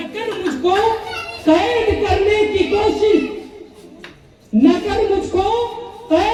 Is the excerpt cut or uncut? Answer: uncut